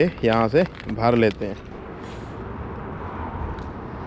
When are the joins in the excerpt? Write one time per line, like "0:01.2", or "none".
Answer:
none